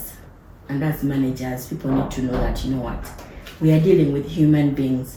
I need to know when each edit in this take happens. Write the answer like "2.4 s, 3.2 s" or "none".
none